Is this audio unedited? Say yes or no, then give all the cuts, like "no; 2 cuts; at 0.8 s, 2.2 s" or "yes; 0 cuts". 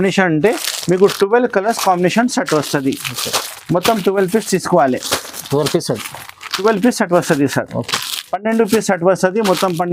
yes; 0 cuts